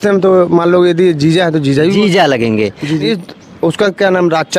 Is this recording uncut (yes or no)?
no